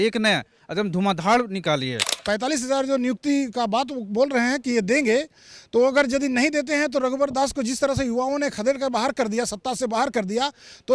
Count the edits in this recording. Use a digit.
1